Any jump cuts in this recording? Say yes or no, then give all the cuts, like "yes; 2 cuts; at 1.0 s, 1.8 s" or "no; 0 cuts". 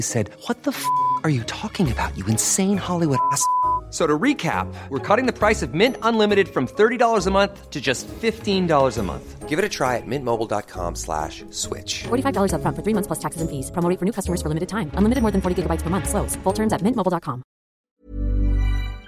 yes; 1 cut; at 17.7 s